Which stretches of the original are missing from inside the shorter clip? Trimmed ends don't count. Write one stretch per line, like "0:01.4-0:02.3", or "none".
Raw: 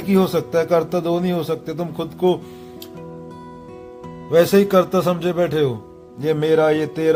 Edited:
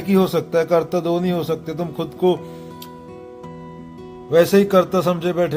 none